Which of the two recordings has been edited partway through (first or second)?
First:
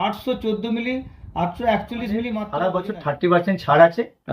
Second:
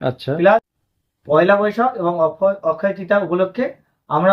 first